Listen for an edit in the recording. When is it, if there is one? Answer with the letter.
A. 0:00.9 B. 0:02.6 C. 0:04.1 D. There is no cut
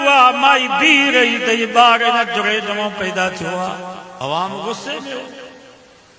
C